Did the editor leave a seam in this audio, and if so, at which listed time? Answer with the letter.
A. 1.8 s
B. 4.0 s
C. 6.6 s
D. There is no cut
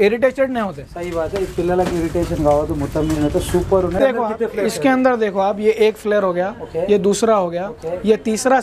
B